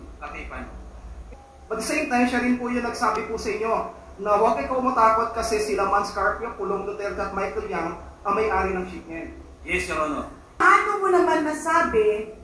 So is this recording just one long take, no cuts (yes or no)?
no